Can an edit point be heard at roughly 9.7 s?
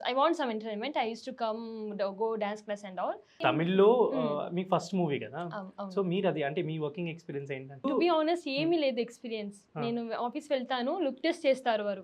no; 2 cuts; at 3.4 s, 7.8 s

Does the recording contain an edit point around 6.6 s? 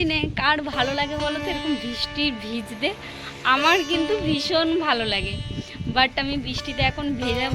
no; 0 cuts

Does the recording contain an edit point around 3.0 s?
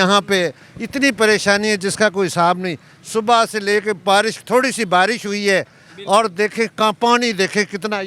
no; 0 cuts

